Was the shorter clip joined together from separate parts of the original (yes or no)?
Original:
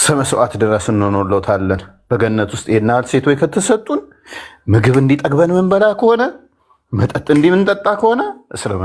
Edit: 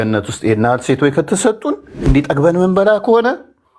yes